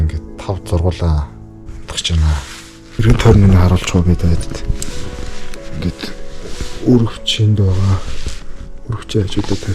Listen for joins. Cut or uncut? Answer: cut